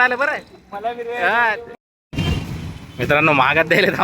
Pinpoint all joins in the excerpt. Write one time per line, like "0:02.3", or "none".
0:01.7